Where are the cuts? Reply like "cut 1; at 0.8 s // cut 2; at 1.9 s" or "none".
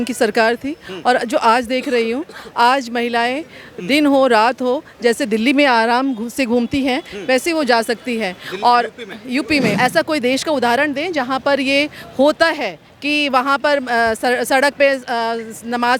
cut 1; at 9.7 s